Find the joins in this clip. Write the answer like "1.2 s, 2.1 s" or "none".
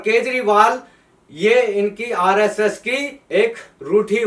3.2 s

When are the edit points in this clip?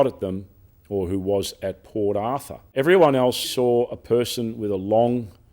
2.6 s, 3.5 s

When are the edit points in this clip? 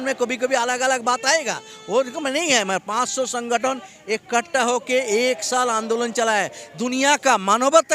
none

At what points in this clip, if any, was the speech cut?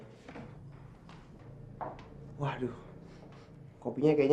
1.5 s

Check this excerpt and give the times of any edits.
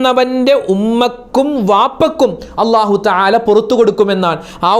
none

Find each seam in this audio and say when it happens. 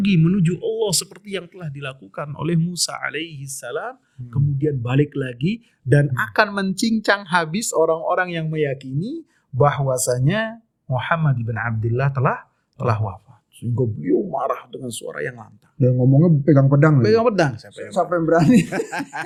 none

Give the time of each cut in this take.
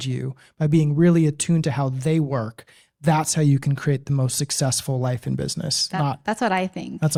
none

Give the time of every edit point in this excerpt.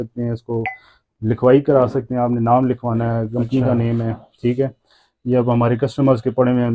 none

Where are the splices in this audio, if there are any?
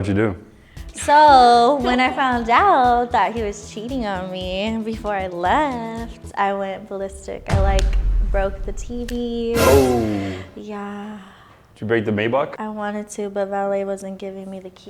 12.6 s

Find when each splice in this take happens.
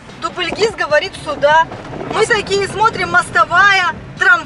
none

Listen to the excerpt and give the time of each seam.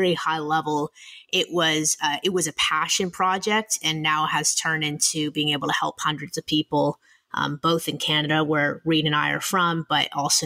none

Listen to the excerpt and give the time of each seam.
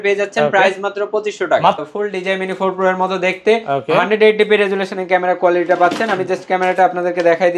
1.8 s

